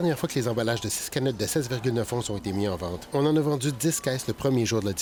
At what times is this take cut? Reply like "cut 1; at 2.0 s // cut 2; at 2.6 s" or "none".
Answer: none